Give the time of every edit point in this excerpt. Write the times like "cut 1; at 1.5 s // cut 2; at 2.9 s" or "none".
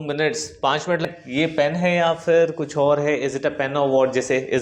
cut 1; at 1.0 s